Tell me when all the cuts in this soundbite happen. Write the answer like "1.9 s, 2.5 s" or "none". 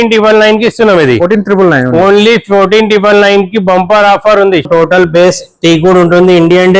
4.7 s

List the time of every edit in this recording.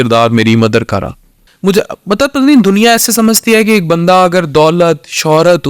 1.4 s

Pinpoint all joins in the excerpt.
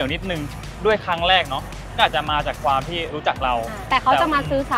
none

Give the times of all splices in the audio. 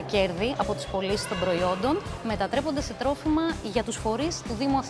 none

